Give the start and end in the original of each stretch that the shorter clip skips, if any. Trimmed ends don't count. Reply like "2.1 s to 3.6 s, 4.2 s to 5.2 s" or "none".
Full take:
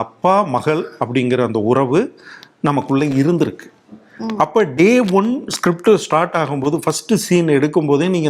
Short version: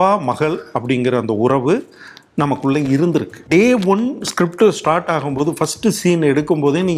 3.7 s to 4.7 s